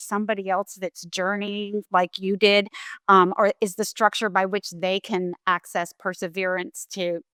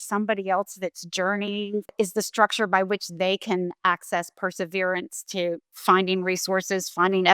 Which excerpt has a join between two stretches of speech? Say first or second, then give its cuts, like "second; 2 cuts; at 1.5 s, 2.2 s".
second; 2 cuts; at 1.9 s, 5.7 s